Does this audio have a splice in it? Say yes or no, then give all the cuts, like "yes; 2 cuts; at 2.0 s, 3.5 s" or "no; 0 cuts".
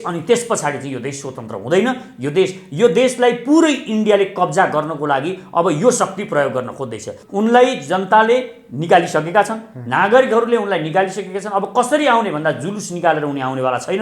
yes; 1 cut; at 7.2 s